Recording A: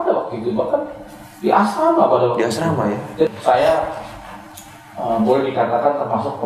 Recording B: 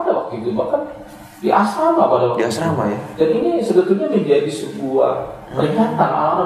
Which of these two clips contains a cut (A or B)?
A